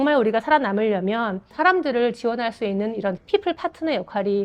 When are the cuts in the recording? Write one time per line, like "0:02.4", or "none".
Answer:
0:01.5
0:03.2

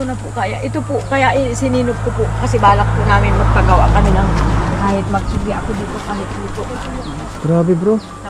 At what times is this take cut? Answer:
0:07.3

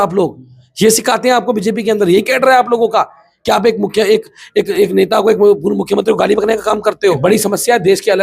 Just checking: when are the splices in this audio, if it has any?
0:07.2

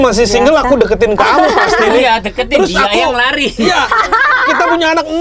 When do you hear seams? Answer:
none

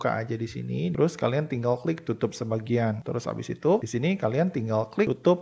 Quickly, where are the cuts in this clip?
0:01.0
0:03.0

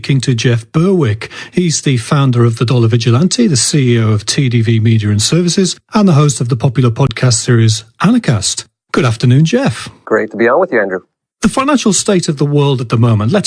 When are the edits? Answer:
0:04.0

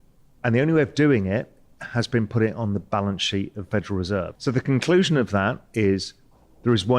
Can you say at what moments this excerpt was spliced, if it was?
0:04.3

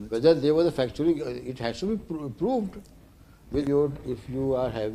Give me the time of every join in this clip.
0:03.6

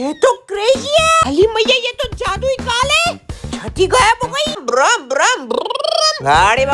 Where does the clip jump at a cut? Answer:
0:01.2
0:04.6

